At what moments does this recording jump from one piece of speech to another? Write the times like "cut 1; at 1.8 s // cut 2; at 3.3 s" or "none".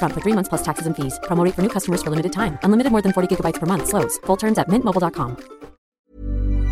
cut 1; at 5.8 s